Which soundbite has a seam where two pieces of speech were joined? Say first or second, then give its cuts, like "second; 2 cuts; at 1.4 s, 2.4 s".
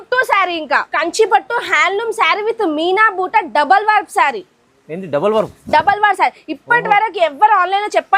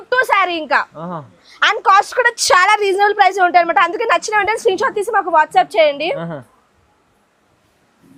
first; 1 cut; at 0.9 s